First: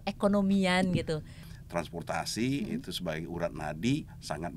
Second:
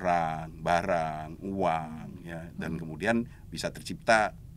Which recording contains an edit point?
first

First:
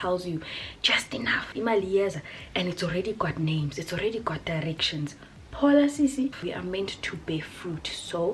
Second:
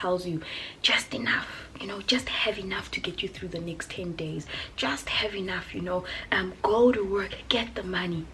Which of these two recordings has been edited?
first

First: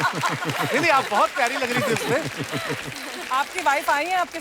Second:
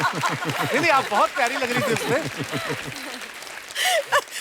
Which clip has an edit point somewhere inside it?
first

